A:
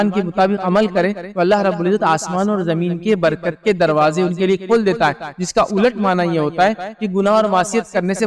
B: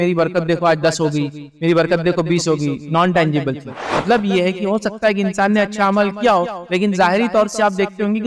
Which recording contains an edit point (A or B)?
B